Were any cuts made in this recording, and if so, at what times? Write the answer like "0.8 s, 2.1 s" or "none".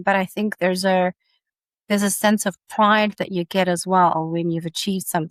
none